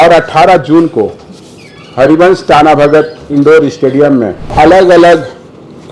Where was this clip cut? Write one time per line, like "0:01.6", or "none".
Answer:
0:04.5